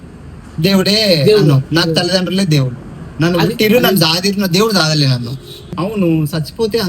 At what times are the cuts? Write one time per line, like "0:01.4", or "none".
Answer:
0:05.7